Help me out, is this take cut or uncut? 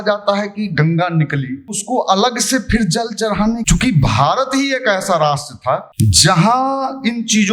cut